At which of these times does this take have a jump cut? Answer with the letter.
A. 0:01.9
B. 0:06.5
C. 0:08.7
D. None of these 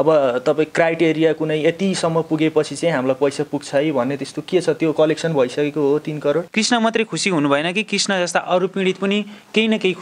B